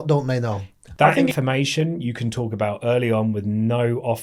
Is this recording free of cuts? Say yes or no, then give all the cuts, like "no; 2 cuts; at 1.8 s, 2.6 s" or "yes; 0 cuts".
no; 1 cut; at 1.3 s